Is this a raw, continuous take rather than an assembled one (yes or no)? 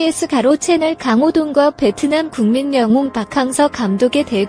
yes